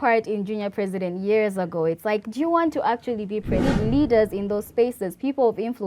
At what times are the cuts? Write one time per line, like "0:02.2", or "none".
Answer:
0:03.5